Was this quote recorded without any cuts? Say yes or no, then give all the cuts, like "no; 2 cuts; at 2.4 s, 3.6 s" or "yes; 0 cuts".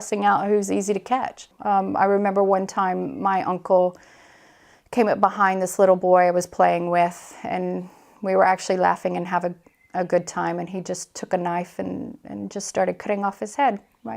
no; 1 cut; at 1.5 s